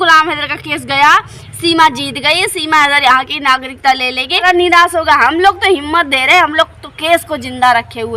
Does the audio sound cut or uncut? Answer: cut